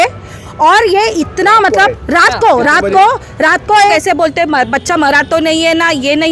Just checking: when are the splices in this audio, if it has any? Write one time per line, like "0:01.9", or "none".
0:03.9

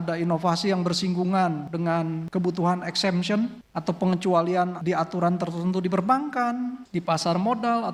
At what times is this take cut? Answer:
none

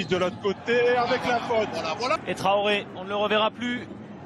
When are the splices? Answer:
0:02.2

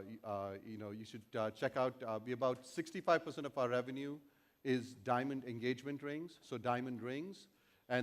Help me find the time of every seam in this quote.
0:04.4

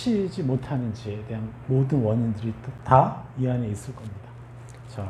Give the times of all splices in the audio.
0:02.7

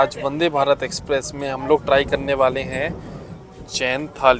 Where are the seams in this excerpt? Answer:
none

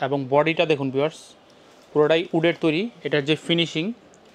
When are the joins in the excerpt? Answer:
none

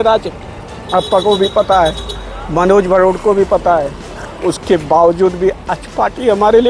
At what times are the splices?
none

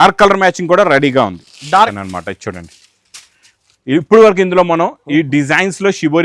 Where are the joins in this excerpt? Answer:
0:01.9

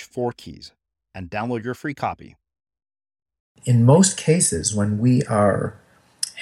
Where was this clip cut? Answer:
0:03.6

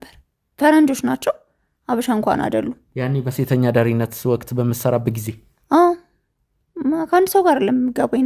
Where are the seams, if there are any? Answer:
none

